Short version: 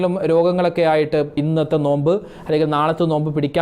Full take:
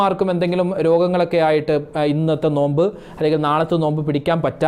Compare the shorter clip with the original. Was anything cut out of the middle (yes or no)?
yes